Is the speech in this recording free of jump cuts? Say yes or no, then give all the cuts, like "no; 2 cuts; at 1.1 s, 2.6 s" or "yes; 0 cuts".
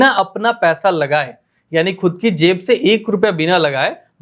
yes; 0 cuts